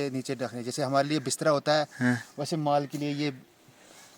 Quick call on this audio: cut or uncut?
uncut